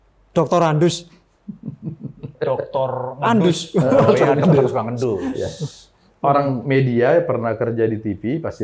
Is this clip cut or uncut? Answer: uncut